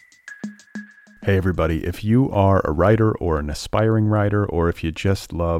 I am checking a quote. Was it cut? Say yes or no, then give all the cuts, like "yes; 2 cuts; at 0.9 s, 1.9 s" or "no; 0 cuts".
yes; 1 cut; at 0.9 s